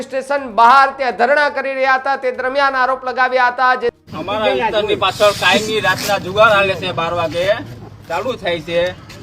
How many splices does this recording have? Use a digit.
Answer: 1